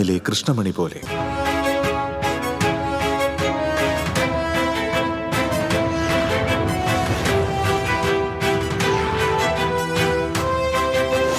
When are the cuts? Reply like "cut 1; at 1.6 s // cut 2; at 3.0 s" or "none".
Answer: cut 1; at 1.0 s